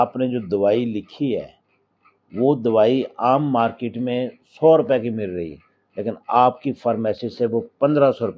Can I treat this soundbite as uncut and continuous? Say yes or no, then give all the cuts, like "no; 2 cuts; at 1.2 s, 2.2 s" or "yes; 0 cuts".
yes; 0 cuts